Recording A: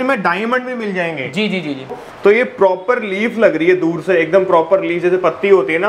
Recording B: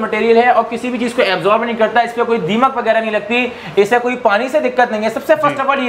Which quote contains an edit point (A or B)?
A